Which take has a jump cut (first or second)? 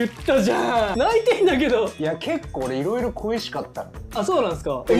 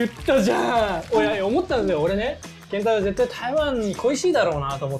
first